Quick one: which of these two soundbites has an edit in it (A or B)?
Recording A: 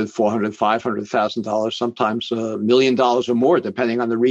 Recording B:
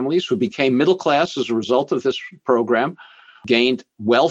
B